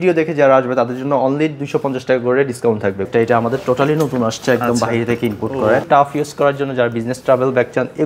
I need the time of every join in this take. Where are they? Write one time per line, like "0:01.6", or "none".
0:03.1
0:05.9